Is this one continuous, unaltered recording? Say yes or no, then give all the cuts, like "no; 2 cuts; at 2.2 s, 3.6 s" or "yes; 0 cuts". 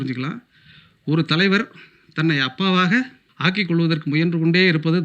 no; 1 cut; at 3.2 s